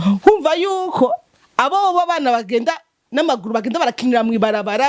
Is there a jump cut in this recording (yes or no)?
no